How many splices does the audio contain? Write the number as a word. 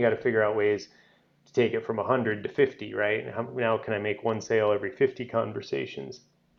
zero